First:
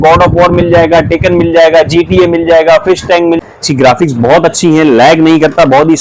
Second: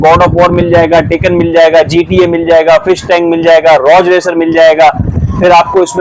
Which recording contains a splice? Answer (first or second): first